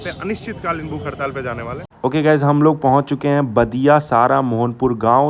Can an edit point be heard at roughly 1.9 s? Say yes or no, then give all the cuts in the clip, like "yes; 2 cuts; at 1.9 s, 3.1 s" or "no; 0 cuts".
no; 0 cuts